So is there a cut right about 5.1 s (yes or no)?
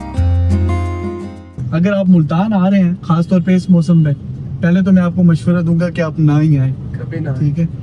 no